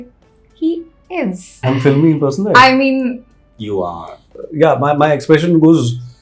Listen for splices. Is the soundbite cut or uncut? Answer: cut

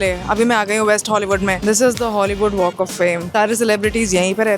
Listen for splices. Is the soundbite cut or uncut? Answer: cut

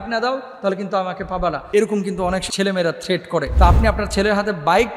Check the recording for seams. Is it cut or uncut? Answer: cut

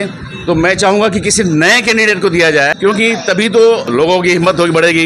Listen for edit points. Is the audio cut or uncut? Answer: cut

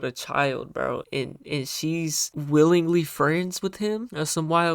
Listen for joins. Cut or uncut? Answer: cut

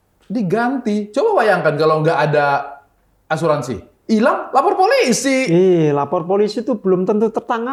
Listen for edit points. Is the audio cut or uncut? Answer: uncut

